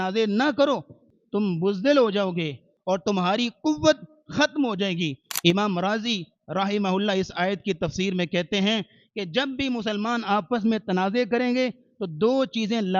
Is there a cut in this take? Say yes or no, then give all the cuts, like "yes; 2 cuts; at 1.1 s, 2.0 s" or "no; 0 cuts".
yes; 2 cuts; at 1.1 s, 2.7 s